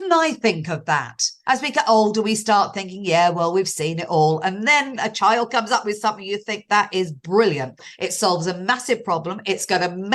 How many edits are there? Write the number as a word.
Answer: two